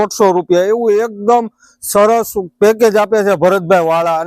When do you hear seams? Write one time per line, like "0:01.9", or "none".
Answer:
none